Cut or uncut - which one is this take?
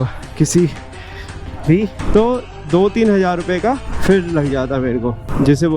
cut